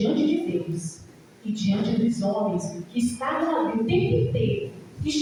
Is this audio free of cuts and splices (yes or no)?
yes